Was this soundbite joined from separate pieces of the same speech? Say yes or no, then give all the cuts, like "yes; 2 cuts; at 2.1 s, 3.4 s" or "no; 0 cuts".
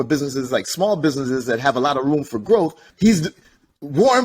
yes; 1 cut; at 2.8 s